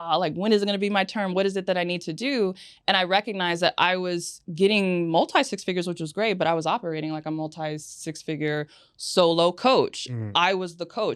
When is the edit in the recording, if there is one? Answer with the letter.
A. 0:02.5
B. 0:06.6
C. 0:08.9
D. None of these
D